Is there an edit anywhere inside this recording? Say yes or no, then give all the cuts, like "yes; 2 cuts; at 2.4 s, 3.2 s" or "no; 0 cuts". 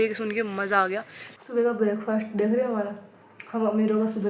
yes; 1 cut; at 1.2 s